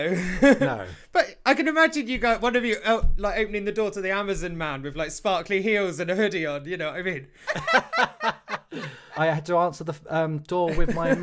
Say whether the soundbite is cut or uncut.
cut